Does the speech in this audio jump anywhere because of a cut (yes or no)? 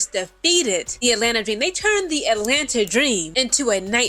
yes